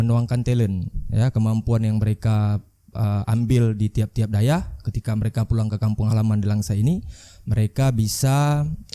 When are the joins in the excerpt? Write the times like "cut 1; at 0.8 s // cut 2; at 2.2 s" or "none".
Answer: none